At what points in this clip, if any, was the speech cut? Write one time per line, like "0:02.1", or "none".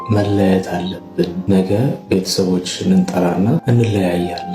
0:01.4
0:03.6